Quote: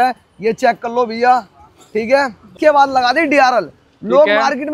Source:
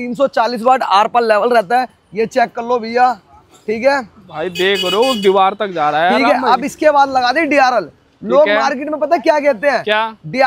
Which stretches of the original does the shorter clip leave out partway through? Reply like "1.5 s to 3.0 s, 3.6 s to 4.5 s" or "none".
4.2 s to 6.7 s

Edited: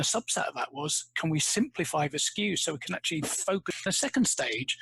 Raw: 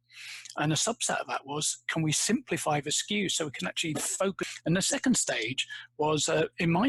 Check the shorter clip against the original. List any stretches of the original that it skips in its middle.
4.6 s to 4.8 s

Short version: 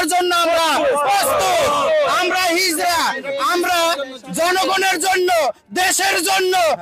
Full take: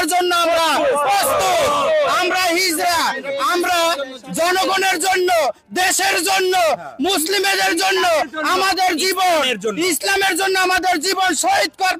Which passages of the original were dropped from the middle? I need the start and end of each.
none

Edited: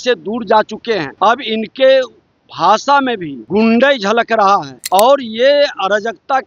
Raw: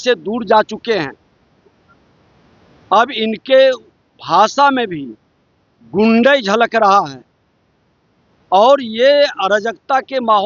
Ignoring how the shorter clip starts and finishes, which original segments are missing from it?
1.1 s to 2.8 s, 5.0 s to 5.8 s, 7.2 s to 8.3 s

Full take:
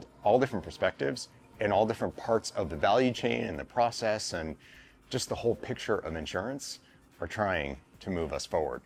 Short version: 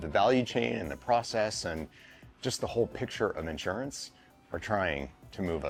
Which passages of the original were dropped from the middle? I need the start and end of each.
none

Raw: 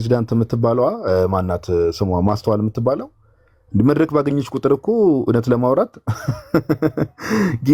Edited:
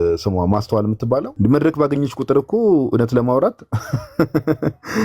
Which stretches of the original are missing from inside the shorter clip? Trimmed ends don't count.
3.1 s to 3.7 s

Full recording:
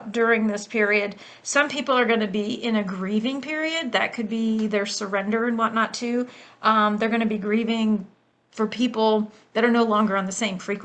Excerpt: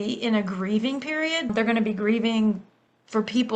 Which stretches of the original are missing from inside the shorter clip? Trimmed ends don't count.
3.9 s to 7.0 s

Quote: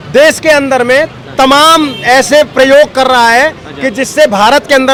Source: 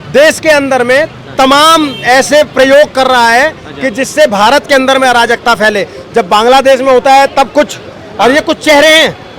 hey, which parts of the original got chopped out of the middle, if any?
none

